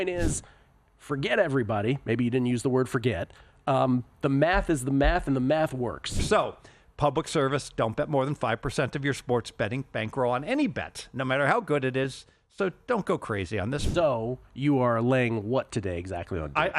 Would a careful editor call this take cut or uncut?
cut